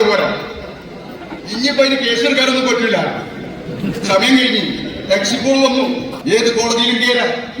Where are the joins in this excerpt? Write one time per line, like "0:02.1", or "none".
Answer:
0:06.1